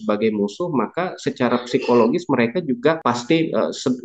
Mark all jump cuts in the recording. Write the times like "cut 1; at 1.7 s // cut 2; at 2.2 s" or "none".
cut 1; at 3.0 s